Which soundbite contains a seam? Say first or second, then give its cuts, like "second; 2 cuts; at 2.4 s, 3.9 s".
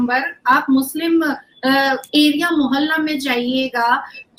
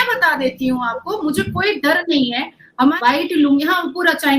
second; 1 cut; at 3.0 s